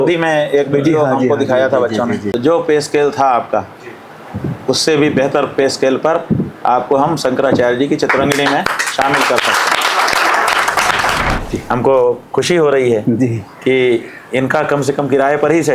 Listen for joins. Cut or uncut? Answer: cut